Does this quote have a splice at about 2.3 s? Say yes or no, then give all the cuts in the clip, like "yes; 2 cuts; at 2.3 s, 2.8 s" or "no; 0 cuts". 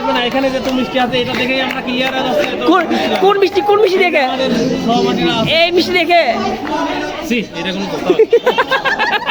no; 0 cuts